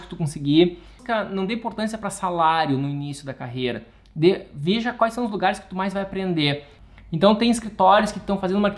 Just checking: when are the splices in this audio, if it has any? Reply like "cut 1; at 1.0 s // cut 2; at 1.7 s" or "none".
cut 1; at 1.0 s // cut 2; at 6.7 s